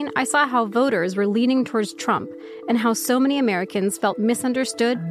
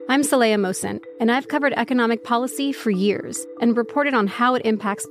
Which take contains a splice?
second; 1 cut; at 3.4 s

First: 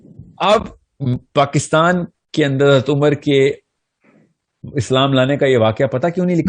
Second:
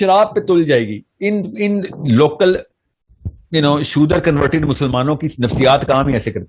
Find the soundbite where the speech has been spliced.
first; 1 cut; at 1.2 s

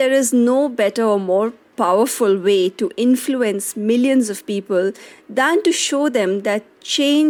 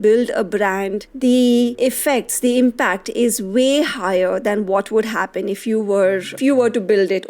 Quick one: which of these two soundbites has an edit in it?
second; 3 cuts; at 1.0 s, 1.7 s, 6.4 s

